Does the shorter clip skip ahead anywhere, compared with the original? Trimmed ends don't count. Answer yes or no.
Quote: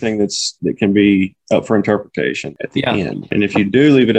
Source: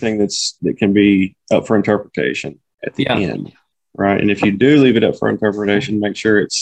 yes